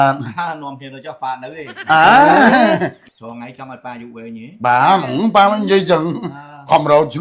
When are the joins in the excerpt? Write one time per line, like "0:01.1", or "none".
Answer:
0:03.0